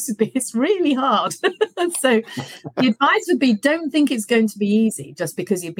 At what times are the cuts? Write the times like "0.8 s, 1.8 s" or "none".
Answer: none